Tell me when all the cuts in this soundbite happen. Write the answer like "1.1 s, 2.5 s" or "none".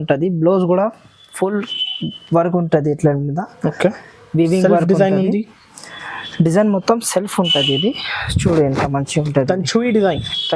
none